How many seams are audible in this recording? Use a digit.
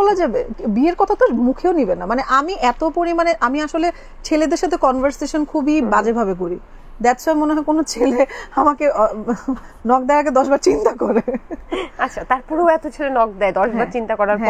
0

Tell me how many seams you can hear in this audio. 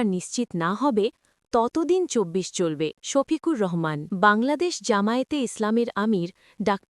2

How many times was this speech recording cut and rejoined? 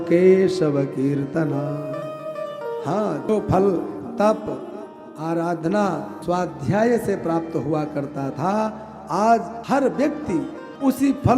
2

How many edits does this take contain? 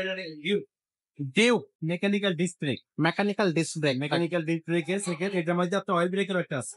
1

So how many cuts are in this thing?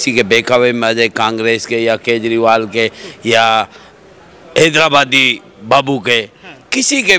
0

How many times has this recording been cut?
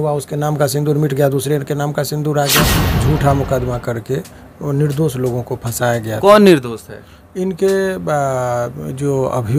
1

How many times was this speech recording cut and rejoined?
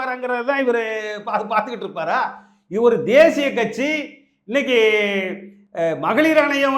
0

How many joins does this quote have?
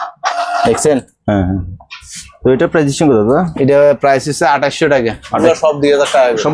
1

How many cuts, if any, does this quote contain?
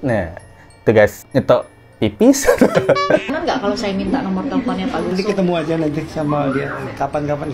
2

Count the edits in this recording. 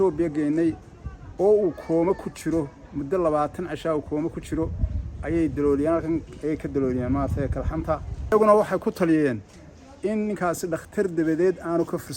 1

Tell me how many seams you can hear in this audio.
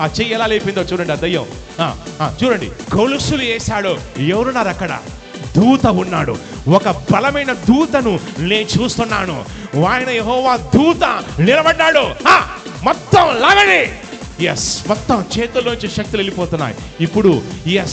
1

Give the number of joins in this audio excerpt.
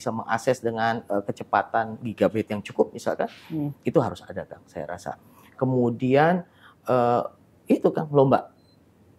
0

